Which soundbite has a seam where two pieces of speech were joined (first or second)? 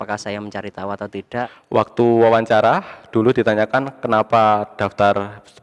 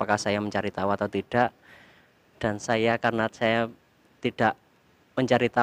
first